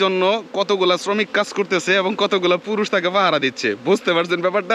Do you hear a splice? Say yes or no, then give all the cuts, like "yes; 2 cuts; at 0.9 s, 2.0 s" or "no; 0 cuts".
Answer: no; 0 cuts